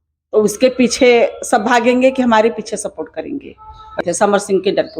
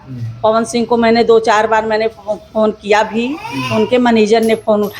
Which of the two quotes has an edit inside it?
first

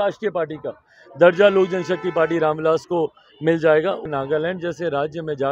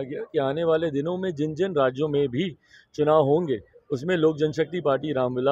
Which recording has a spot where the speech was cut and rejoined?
first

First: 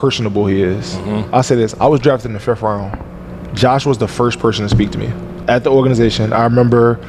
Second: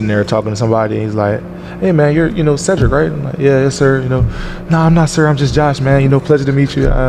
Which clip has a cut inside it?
first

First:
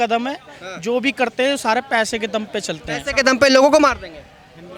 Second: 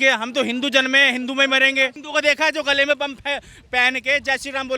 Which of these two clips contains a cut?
second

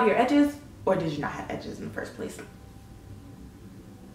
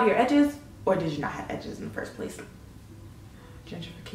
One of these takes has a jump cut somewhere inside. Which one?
second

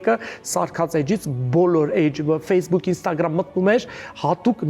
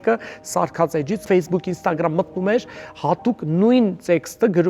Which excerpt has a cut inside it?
second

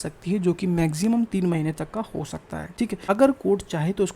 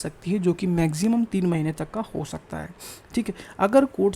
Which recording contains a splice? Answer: first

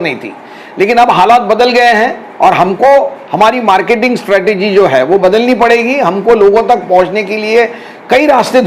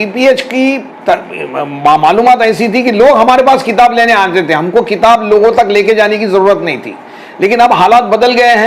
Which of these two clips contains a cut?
second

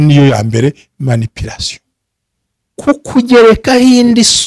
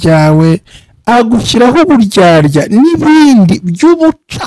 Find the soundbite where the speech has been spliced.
first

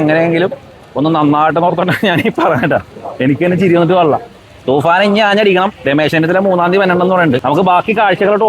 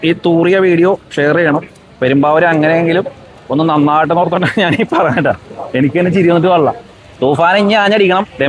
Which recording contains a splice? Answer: first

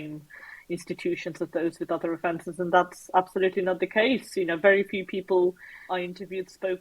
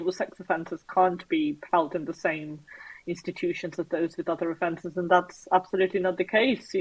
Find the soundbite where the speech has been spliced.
first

